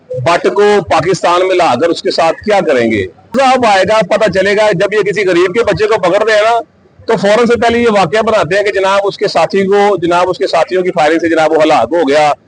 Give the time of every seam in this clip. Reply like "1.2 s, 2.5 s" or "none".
3.3 s